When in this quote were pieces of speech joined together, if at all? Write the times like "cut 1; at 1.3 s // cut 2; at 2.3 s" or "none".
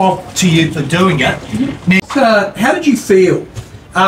cut 1; at 2.0 s